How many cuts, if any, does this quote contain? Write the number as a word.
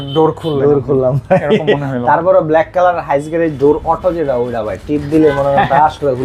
zero